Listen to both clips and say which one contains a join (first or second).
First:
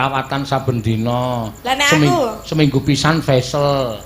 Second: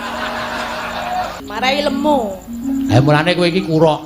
second